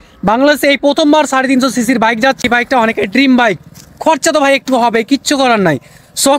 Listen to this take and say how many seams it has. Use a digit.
1